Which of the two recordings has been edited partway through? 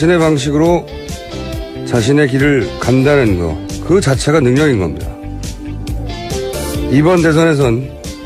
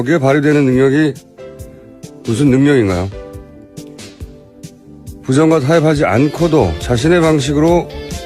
second; 1 cut; at 5.8 s

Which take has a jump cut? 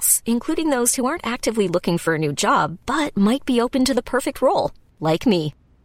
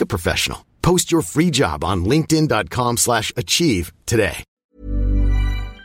second; 1 cut; at 4.5 s

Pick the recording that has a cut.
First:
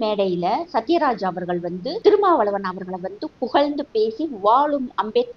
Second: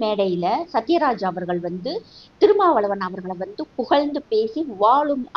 first; 1 cut; at 1.9 s

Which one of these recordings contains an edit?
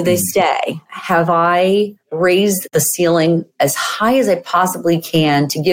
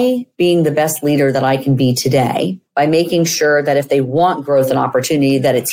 first; 1 cut; at 2.6 s

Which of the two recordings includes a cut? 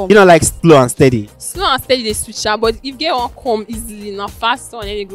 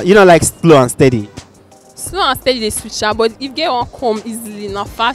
first; 1 cut; at 1.4 s

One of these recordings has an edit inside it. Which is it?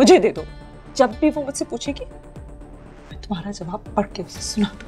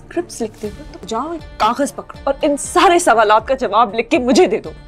second; 2 cuts; at 0.9 s, 2.1 s

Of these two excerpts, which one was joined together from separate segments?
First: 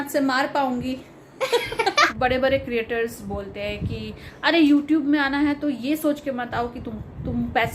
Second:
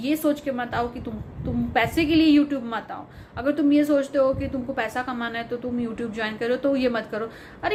first; 1 cut; at 2.1 s

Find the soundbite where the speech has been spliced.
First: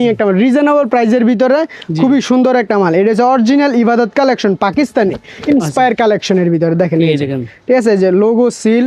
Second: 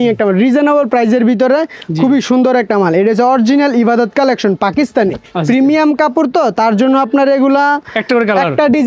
second; 1 cut; at 5.3 s

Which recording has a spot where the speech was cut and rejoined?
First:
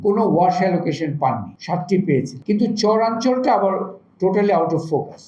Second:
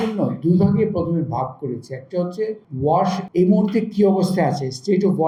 first; 1 cut; at 2.3 s

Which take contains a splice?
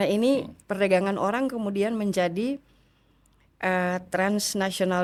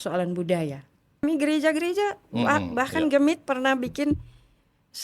second; 1 cut; at 1.2 s

